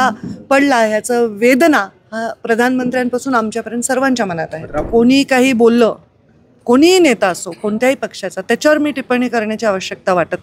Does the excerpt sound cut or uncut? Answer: cut